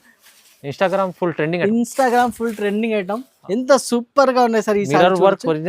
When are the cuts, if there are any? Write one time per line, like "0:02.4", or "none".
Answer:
0:03.3